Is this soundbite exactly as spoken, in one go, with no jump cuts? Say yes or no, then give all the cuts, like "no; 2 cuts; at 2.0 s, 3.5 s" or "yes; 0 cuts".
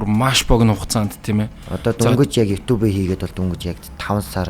yes; 0 cuts